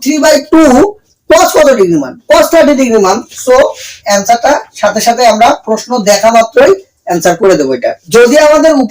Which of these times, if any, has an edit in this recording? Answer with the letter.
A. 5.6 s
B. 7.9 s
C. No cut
B